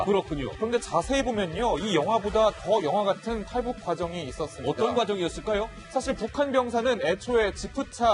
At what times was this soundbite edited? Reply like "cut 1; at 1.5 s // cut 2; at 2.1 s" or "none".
cut 1; at 5.2 s